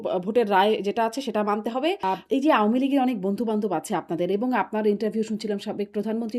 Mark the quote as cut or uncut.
cut